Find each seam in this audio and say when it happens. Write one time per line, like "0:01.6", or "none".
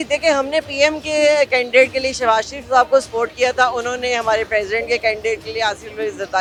none